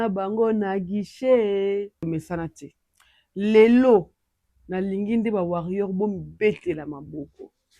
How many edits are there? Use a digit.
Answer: 1